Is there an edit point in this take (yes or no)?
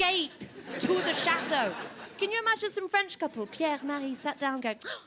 no